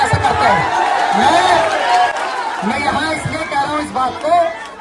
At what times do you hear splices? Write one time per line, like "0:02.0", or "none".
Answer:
none